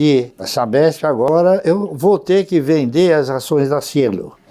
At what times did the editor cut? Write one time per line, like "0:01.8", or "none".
0:01.3